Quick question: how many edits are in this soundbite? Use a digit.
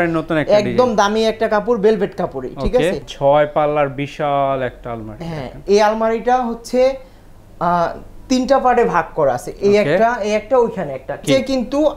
2